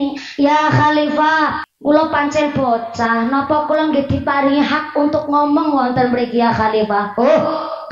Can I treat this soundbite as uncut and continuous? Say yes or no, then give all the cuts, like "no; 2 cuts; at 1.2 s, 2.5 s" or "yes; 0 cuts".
no; 1 cut; at 1.6 s